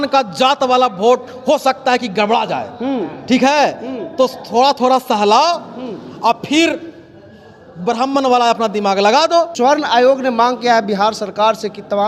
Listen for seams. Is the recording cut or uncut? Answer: cut